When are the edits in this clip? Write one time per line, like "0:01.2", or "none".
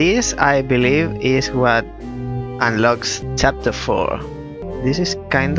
0:03.2
0:04.6